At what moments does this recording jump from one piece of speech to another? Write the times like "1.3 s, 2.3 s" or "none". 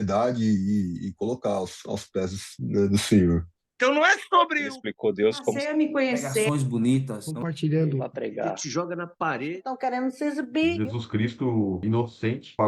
3.6 s